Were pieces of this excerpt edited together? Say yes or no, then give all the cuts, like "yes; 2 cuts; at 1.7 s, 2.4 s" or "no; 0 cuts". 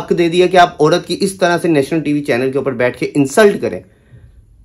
no; 0 cuts